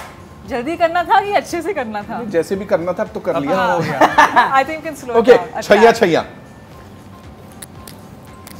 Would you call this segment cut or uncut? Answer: uncut